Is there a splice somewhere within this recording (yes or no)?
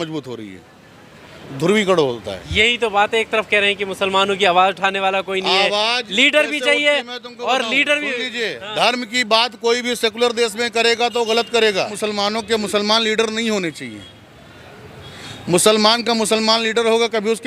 yes